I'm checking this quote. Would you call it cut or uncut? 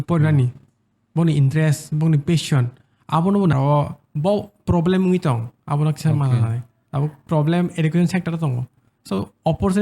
cut